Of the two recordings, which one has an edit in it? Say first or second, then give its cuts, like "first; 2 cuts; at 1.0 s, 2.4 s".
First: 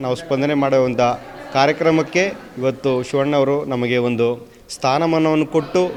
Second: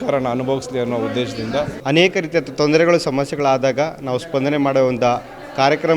second; 1 cut; at 1.8 s